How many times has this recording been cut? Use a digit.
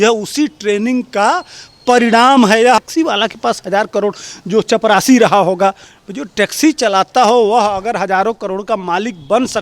1